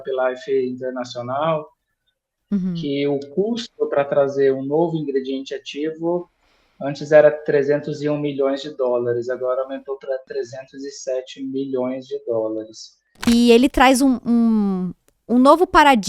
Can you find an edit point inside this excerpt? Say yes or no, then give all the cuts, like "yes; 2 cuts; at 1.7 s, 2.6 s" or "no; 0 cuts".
yes; 1 cut; at 13.3 s